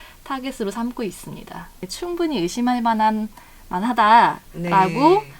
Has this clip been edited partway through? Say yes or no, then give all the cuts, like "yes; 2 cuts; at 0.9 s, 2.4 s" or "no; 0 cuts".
yes; 1 cut; at 1.8 s